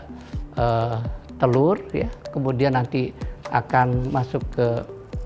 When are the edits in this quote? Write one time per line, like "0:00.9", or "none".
none